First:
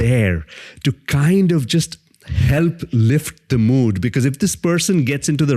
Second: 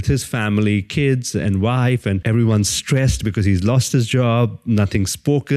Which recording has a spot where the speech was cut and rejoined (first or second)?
second